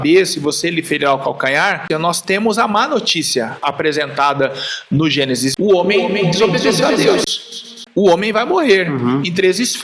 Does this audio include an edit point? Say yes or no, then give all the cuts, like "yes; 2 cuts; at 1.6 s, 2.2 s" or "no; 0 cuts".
yes; 2 cuts; at 1.8 s, 5.5 s